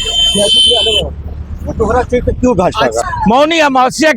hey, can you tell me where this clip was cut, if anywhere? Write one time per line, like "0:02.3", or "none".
0:03.0